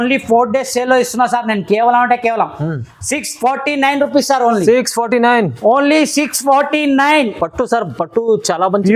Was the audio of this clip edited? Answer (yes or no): no